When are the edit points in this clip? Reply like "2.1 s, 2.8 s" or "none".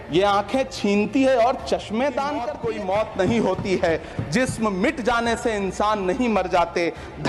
2.5 s